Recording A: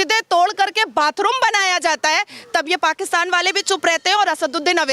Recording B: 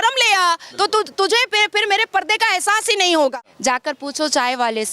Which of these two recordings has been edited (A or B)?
B